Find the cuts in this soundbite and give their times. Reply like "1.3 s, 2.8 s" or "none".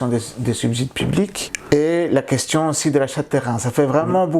1.5 s